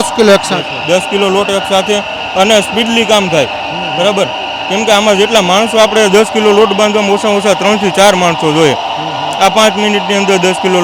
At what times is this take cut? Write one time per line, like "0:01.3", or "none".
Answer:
none